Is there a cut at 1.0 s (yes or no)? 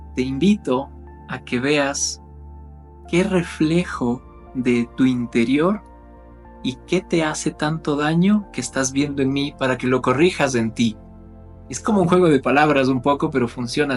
no